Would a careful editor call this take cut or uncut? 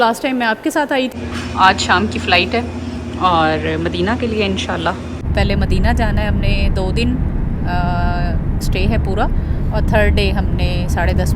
cut